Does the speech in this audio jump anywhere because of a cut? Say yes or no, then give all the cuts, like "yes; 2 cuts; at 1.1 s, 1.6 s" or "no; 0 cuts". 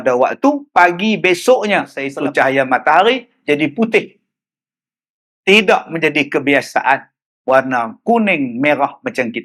yes; 1 cut; at 2.0 s